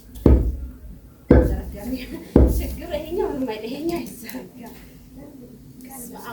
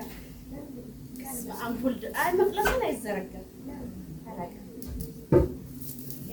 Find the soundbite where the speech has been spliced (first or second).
first